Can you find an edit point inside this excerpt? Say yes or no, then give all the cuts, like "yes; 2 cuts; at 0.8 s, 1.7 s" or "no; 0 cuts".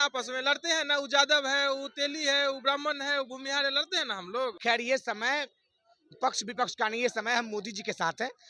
yes; 1 cut; at 4.6 s